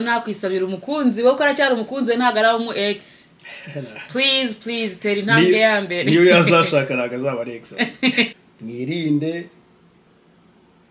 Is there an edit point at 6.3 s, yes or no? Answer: no